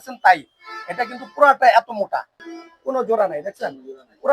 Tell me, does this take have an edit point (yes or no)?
yes